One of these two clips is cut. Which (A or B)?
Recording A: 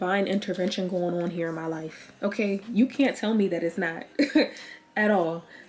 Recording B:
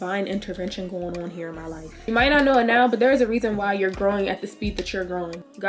B